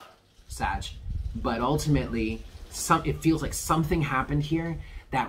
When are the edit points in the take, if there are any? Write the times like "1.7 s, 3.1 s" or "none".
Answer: none